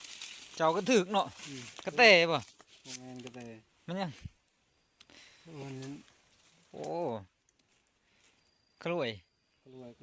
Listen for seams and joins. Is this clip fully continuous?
yes; 0 cuts

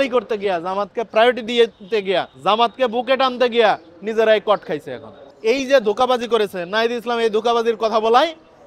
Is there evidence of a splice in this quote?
yes; 1 cut; at 5.2 s

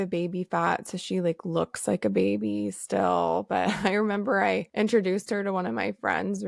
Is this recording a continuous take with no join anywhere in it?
no; 1 cut; at 4.7 s

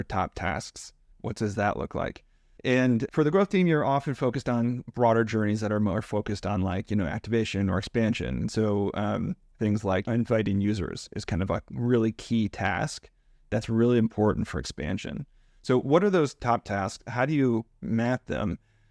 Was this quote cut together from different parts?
yes; 1 cut; at 1.0 s

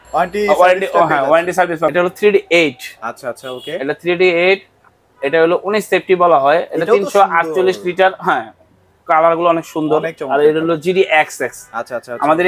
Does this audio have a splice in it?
no; 0 cuts

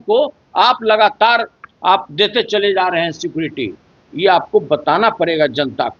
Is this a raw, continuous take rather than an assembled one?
yes; 0 cuts

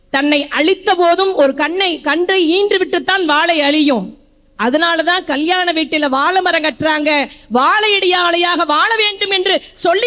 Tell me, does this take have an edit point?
no; 0 cuts

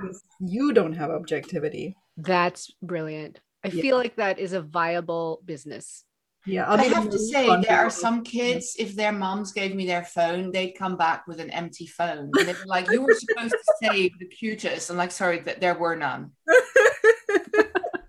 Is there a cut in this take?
no; 0 cuts

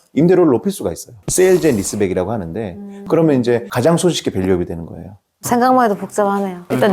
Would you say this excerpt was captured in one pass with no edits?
no; 2 cuts; at 1.2 s, 2.9 s

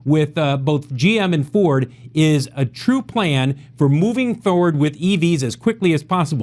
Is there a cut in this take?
no; 0 cuts

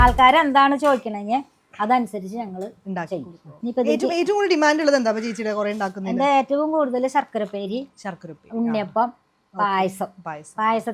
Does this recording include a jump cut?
yes; 1 cut; at 3.4 s

